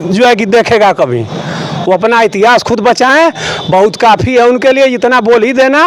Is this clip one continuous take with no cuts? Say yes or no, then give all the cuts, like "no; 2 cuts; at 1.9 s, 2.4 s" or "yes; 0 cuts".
yes; 0 cuts